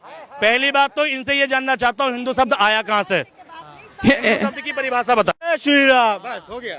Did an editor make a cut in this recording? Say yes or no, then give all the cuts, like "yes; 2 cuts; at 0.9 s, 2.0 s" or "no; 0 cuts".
yes; 1 cut; at 5.5 s